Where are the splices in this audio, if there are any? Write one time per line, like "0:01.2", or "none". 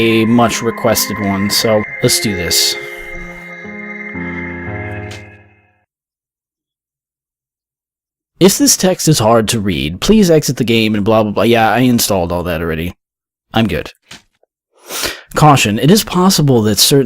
0:11.5